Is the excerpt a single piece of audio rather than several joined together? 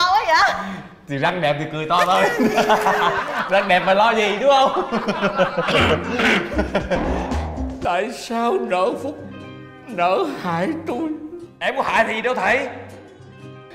no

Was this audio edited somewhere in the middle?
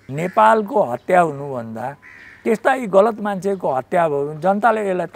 no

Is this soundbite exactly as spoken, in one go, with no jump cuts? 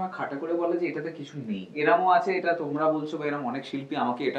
no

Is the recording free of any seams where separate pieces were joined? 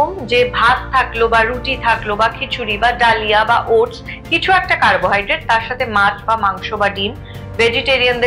yes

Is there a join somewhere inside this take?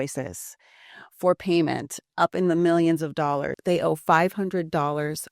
yes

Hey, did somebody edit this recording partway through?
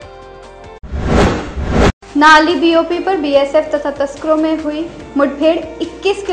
yes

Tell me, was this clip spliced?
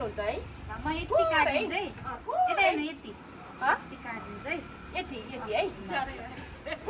no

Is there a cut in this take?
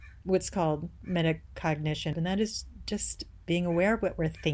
yes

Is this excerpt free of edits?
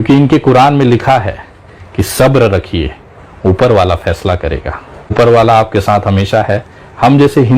no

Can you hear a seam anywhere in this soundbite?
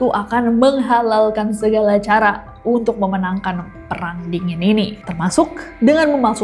no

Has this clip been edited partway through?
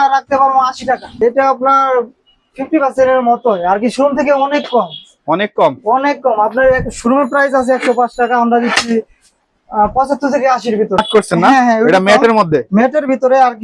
yes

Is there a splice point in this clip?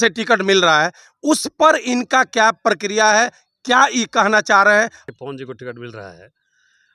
yes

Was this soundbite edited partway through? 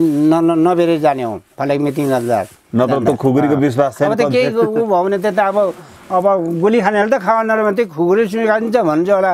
no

